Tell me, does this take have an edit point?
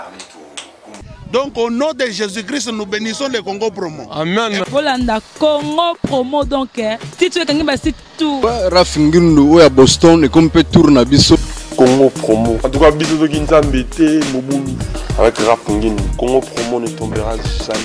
yes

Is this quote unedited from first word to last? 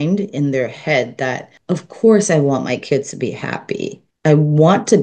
no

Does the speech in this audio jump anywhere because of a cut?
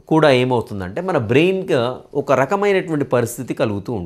no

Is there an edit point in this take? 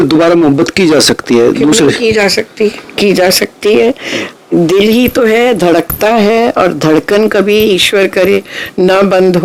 no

